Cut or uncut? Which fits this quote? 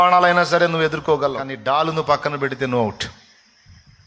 cut